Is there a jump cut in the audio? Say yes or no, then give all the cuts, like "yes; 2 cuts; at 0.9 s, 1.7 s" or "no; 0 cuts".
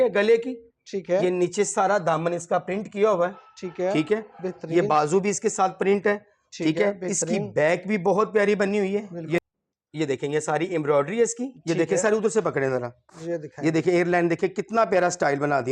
yes; 1 cut; at 9.4 s